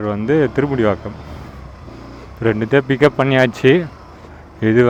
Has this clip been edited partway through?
no; 0 cuts

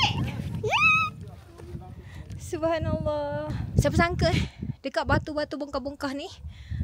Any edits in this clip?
yes; 1 cut; at 3.6 s

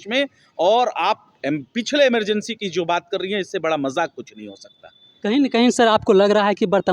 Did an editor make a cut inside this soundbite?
no; 0 cuts

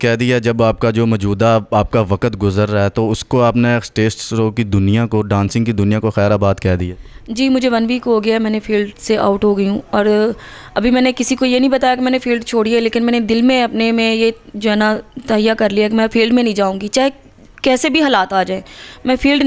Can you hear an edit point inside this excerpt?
no; 0 cuts

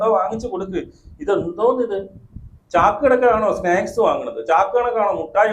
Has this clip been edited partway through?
no; 0 cuts

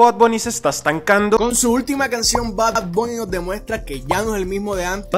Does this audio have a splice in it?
no; 0 cuts

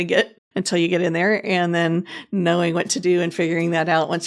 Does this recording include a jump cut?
no; 0 cuts

